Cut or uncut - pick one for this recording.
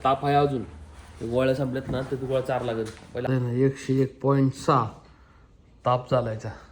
cut